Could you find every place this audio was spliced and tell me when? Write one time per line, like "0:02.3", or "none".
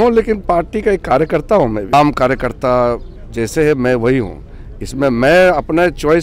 0:01.9